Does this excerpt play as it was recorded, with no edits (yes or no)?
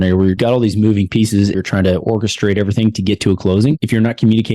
no